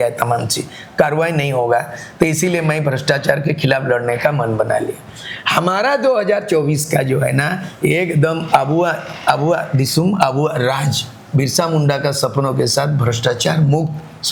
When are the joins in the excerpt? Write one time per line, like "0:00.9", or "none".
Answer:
none